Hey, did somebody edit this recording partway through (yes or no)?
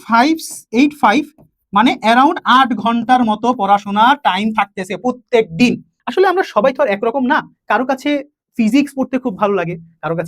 yes